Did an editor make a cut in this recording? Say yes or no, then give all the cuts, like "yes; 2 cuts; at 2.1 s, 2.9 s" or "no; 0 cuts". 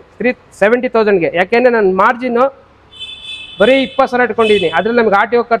no; 0 cuts